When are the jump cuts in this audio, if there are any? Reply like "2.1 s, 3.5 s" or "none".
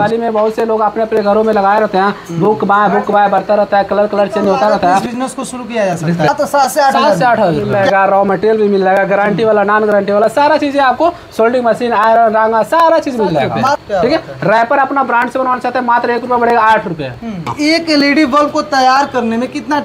5.0 s, 6.3 s, 7.6 s, 13.8 s, 17.5 s